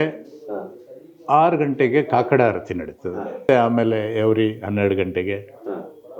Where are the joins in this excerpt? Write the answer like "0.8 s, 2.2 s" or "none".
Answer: 3.4 s